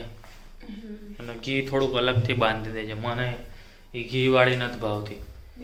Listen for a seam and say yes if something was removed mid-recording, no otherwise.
no